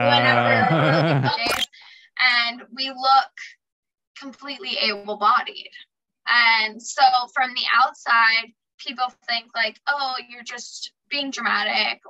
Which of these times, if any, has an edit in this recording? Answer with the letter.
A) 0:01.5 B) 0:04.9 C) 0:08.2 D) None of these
A